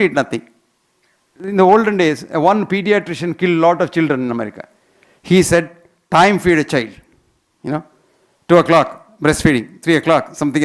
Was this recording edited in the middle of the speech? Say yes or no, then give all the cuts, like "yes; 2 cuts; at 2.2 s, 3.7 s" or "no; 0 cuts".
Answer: yes; 1 cut; at 1.4 s